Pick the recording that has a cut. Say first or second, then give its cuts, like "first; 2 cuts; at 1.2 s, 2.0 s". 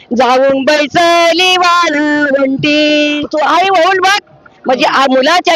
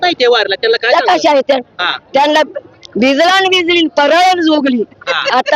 first; 1 cut; at 3.2 s